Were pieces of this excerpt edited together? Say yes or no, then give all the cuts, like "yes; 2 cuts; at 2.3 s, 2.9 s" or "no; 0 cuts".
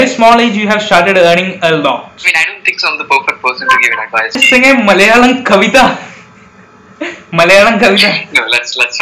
yes; 1 cut; at 4.4 s